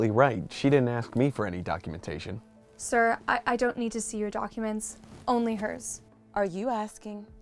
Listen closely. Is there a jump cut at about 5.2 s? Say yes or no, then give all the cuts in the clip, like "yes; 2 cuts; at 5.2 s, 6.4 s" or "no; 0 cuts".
no; 0 cuts